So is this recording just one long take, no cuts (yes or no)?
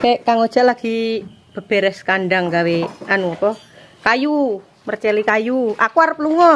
yes